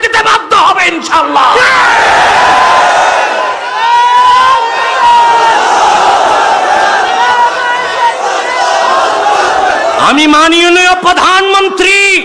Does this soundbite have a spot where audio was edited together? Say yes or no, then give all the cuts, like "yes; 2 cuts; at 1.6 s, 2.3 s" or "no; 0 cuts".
no; 0 cuts